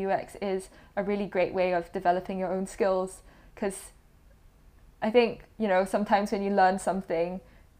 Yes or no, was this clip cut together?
no